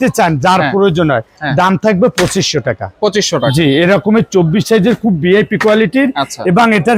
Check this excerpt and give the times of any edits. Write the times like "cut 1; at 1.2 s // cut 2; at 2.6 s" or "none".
none